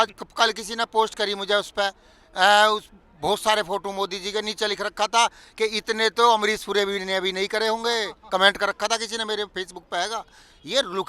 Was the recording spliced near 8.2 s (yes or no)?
no